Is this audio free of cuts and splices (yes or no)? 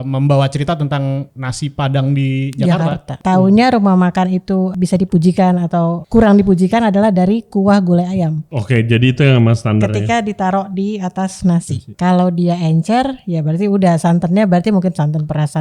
no